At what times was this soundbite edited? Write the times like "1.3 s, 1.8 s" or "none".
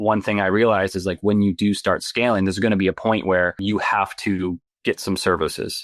3.6 s, 4.7 s